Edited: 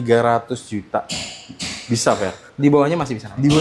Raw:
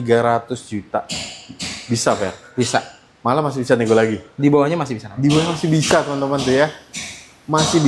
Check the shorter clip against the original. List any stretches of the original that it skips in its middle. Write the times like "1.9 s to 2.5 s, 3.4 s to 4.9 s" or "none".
2.4 s to 4.2 s

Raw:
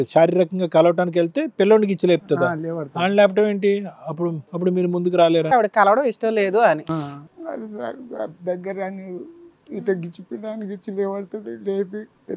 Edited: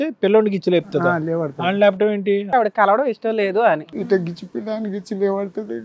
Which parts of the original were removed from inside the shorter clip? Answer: 3.8 s to 5.5 s, 6.8 s to 9.6 s

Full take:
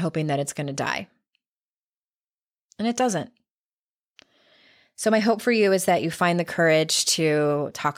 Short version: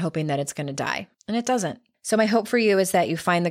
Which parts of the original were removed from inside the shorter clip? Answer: 1.1 s to 2.6 s, 3.4 s to 4.8 s

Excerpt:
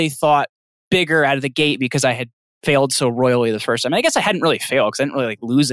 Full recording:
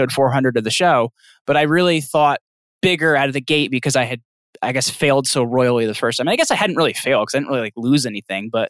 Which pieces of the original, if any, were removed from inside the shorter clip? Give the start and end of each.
4.5 s to 4.9 s

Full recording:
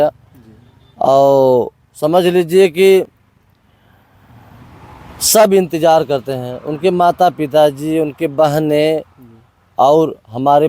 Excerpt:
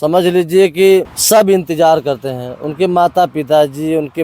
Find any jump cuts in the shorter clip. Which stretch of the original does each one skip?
3.2 s to 5.2 s

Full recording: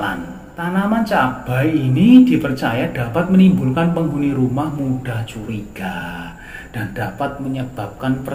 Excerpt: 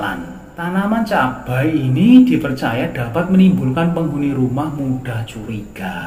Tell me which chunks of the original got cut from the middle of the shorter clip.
none

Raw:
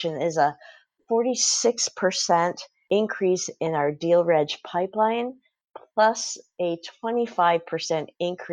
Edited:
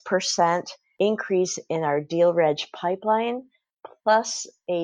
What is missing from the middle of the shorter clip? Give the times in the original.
none

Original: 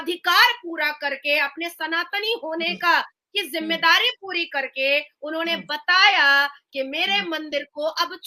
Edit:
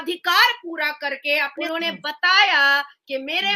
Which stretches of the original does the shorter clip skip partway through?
1.6 s to 5.2 s

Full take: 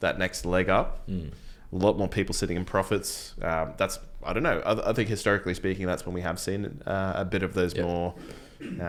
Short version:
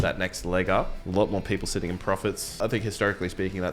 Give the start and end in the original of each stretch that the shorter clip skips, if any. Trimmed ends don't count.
1.0 s to 1.6 s, 3.2 s to 4.8 s

